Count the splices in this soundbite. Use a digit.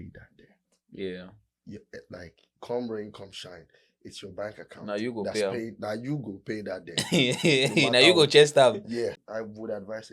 1